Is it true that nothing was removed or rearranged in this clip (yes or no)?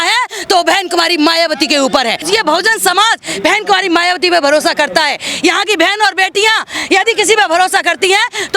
no